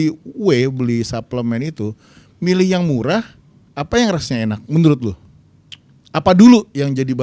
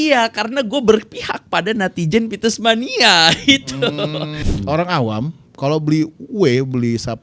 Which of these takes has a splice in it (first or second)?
second